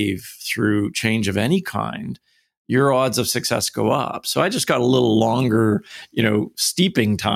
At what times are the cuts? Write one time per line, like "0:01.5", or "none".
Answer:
none